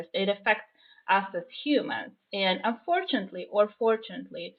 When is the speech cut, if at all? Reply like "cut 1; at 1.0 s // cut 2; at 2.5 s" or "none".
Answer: none